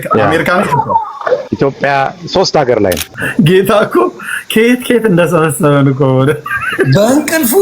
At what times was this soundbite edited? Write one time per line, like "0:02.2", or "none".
0:01.5
0:03.1